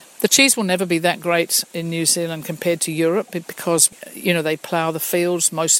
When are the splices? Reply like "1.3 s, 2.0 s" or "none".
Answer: 3.9 s

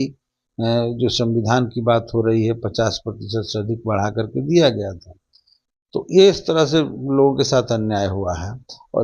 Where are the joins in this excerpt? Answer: none

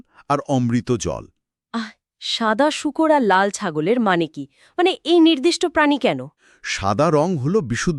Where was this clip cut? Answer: none

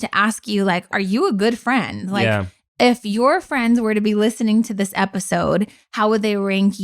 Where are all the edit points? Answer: 0.9 s

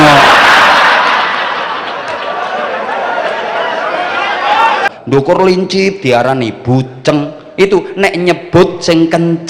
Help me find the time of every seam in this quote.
4.9 s

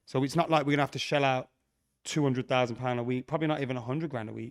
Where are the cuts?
none

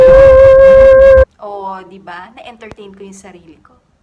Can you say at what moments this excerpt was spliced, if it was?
1.2 s

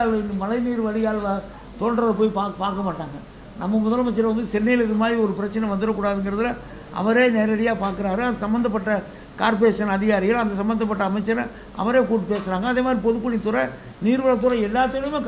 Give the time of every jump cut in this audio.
none

